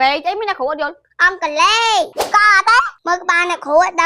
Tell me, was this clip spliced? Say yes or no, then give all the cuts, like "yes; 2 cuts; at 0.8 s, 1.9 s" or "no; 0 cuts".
yes; 1 cut; at 3.0 s